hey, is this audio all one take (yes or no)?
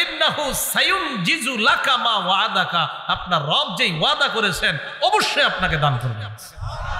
yes